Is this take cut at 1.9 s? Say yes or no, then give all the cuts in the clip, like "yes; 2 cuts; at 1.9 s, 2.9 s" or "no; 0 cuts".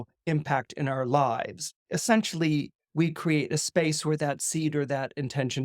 yes; 1 cut; at 1.9 s